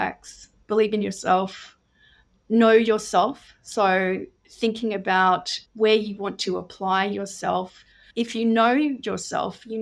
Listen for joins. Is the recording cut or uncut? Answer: uncut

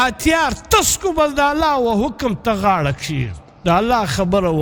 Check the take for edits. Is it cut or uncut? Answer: uncut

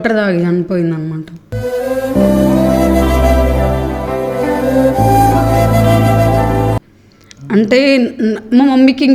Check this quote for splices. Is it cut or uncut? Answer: uncut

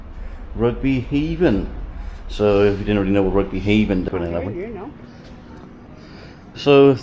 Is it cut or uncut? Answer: cut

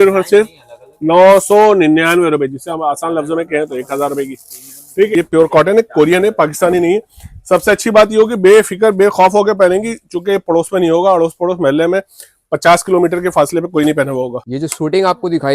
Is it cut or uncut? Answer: cut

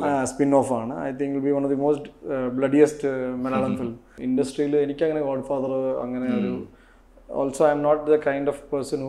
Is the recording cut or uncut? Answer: cut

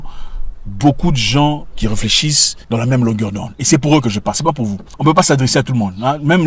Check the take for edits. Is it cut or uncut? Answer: cut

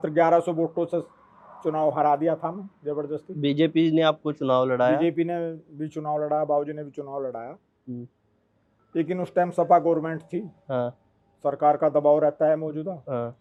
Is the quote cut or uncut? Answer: uncut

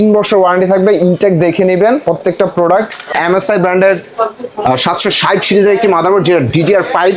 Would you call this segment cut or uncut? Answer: cut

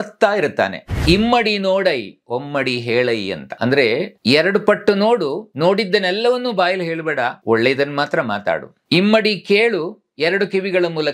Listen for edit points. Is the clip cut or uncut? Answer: cut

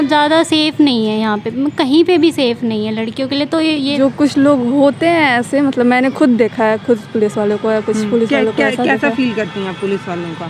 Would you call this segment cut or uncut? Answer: cut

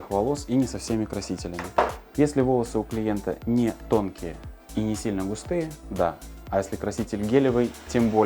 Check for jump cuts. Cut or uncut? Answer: uncut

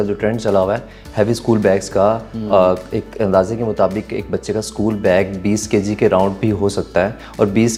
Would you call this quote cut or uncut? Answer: uncut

